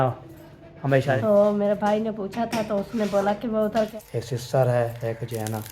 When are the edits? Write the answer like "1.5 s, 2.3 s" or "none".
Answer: 1.1 s, 3.9 s